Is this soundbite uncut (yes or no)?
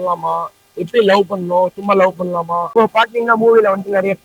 yes